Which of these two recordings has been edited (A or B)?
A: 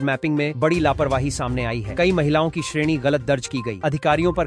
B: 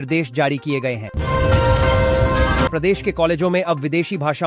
B